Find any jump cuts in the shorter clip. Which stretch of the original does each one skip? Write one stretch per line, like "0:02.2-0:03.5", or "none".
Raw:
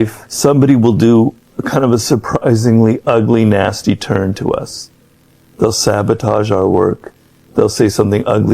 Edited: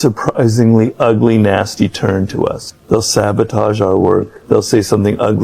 0:04.8-0:05.4
0:07.0-0:07.4